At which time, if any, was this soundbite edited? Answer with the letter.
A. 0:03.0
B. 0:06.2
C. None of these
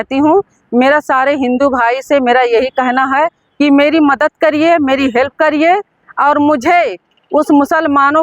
C